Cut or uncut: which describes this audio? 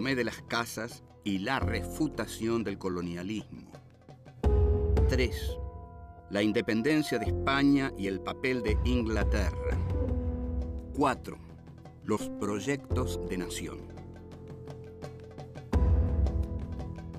cut